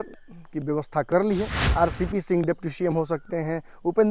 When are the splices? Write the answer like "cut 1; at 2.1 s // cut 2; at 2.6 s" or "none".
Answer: cut 1; at 1.6 s